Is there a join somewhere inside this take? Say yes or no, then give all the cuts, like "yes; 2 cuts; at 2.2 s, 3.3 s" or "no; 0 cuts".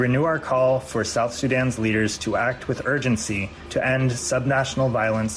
yes; 1 cut; at 3.5 s